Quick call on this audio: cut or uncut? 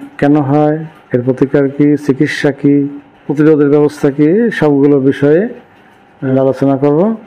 cut